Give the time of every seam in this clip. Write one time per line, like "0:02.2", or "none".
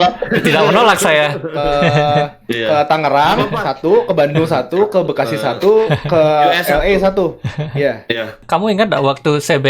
0:08.4